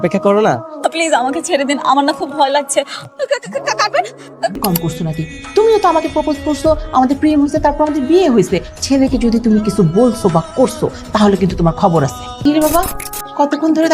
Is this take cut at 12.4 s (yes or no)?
yes